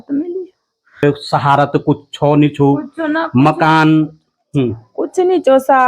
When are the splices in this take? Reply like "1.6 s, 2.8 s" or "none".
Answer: 1.0 s